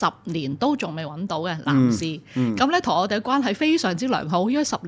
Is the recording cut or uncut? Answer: uncut